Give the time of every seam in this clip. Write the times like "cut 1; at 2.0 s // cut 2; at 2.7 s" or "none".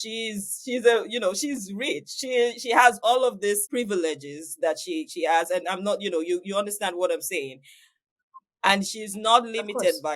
cut 1; at 3.7 s